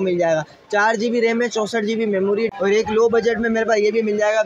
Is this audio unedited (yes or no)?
no